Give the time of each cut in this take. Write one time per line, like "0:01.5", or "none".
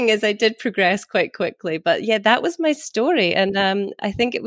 none